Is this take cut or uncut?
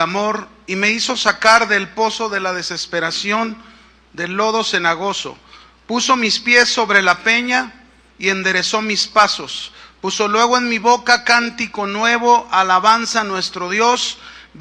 uncut